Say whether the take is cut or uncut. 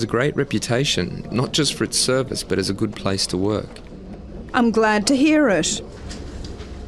cut